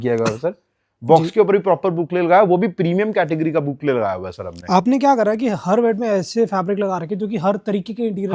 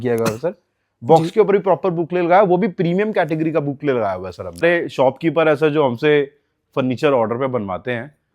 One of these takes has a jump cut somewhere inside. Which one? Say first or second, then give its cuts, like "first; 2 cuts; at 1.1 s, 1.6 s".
second; 1 cut; at 4.6 s